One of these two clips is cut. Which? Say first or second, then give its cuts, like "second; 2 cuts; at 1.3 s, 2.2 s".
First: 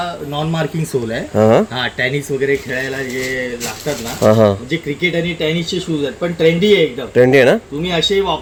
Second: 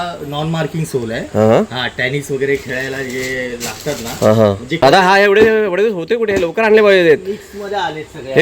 second; 1 cut; at 4.8 s